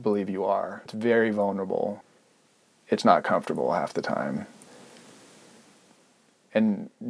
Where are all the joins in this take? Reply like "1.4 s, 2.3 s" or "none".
0.9 s, 2.1 s